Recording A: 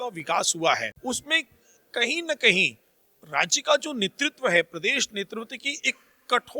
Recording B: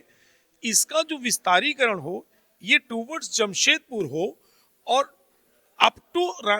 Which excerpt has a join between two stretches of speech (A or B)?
A